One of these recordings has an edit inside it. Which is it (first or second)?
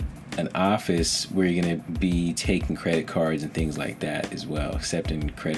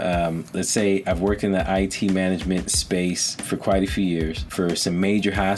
second